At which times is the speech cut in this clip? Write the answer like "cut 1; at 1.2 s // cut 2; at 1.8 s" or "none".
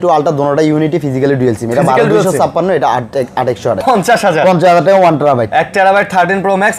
cut 1; at 3.8 s